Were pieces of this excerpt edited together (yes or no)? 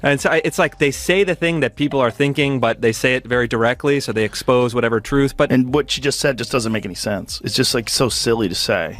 yes